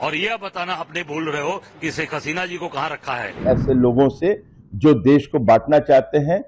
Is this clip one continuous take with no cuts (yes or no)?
no